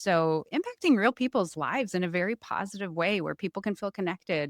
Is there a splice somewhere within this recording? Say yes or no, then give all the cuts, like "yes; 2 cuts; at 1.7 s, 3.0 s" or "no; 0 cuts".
no; 0 cuts